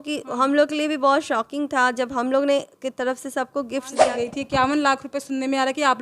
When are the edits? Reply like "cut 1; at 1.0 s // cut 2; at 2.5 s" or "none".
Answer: cut 1; at 4.0 s

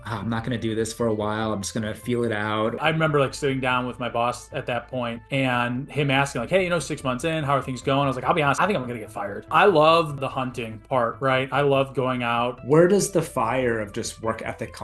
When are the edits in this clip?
cut 1; at 2.6 s // cut 2; at 9.2 s // cut 3; at 12.6 s

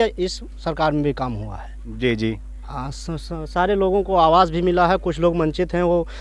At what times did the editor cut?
none

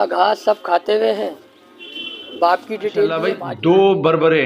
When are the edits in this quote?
cut 1; at 3.3 s

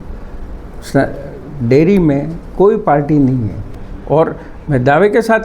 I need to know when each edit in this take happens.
cut 1; at 3.6 s

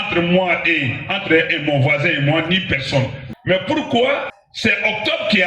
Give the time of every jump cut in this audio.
cut 1; at 3.3 s // cut 2; at 4.4 s

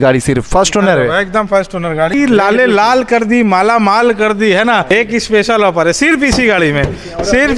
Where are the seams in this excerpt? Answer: cut 1; at 2.1 s // cut 2; at 4.9 s

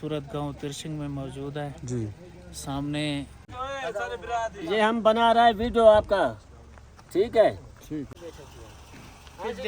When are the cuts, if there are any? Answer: cut 1; at 3.6 s // cut 2; at 8.2 s

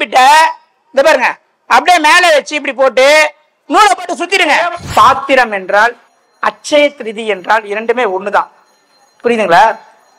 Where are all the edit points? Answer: cut 1; at 4.8 s

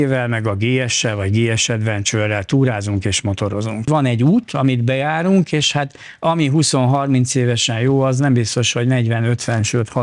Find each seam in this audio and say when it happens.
cut 1; at 3.9 s

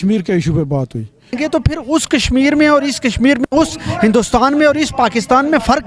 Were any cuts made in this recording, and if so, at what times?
cut 1; at 1.4 s

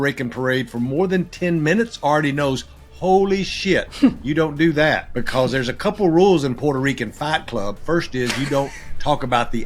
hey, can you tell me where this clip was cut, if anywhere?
cut 1; at 5.1 s

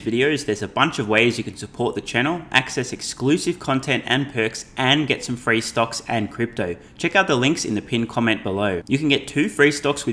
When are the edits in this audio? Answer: none

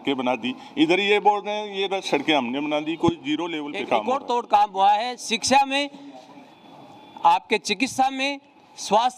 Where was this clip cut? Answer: cut 1; at 4.0 s

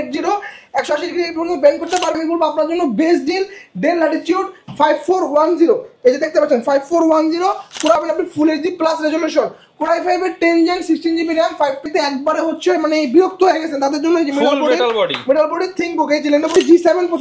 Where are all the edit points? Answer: cut 1; at 2.2 s // cut 2; at 7.9 s // cut 3; at 11.8 s // cut 4; at 16.5 s

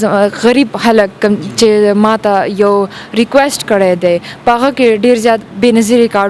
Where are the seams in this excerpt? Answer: none

